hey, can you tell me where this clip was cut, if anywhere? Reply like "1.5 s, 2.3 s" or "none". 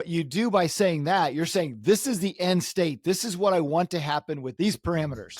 4.5 s